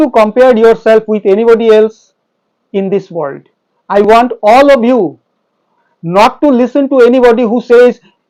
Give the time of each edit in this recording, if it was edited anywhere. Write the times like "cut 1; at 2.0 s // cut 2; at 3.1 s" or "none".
none

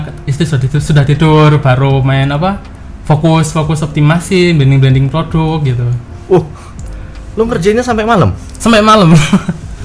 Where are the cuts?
none

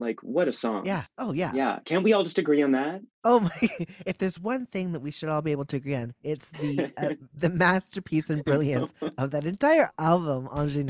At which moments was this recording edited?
cut 1; at 1.1 s // cut 2; at 9.9 s

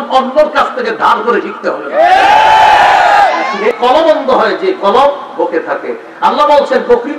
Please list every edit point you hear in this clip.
cut 1; at 3.8 s

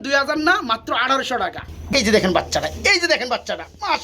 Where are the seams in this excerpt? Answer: cut 1; at 1.9 s

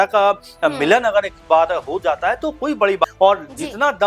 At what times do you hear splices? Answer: cut 1; at 3.0 s

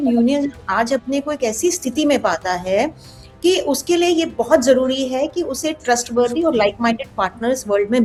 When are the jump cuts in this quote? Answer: none

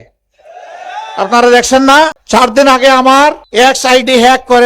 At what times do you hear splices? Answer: cut 1; at 2.2 s // cut 2; at 3.4 s

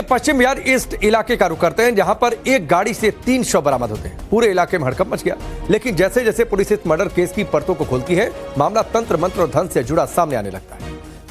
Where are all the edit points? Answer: none

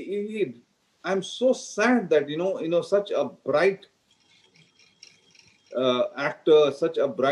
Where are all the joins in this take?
none

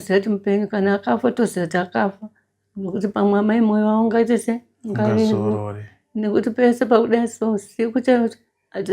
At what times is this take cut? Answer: none

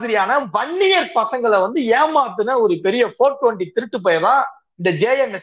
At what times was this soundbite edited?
none

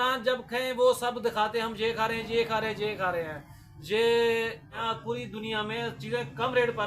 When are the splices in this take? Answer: cut 1; at 4.8 s

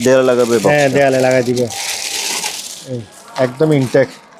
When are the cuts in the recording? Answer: none

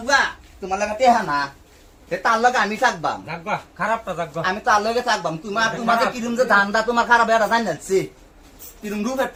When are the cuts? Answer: none

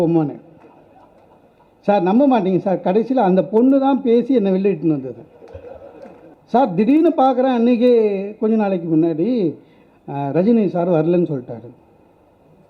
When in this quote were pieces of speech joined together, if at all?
cut 1; at 6.3 s

